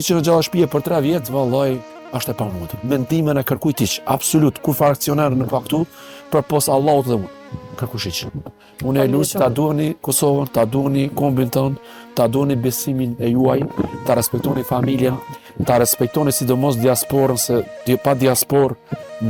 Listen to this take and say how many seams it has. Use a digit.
0